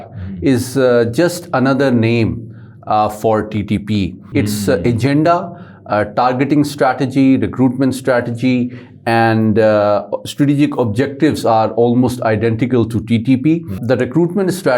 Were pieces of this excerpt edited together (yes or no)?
yes